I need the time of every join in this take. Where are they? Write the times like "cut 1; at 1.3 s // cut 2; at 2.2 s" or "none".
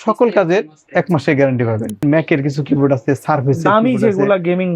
cut 1; at 2.0 s